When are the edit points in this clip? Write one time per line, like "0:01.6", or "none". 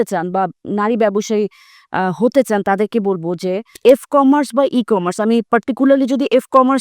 0:03.8